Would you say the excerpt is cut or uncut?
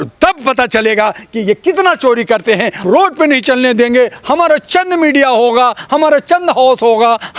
cut